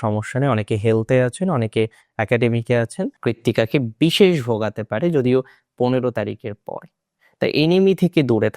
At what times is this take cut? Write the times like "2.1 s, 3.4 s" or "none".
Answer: 3.1 s